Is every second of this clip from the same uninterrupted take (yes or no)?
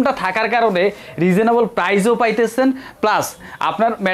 yes